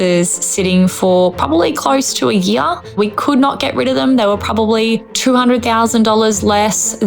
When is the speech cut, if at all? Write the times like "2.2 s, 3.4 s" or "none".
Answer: 2.9 s

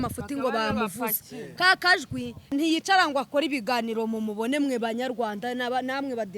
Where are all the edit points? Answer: 2.5 s

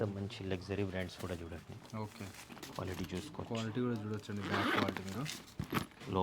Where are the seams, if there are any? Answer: none

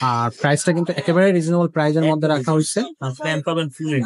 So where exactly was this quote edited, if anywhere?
none

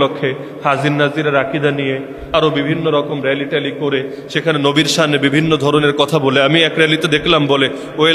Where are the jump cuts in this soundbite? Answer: none

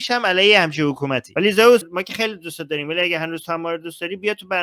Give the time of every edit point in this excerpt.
1.3 s, 1.9 s

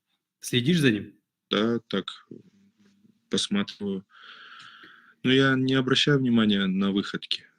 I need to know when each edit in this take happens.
1.5 s

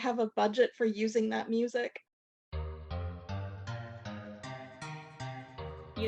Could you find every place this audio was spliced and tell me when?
2.2 s

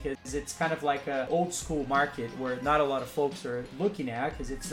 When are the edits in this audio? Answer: 1.3 s, 3.7 s

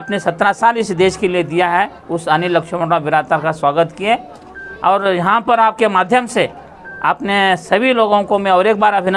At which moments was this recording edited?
none

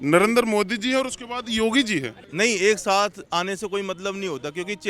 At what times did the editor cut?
2.3 s

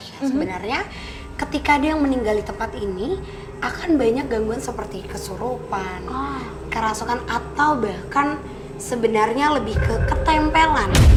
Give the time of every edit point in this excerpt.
none

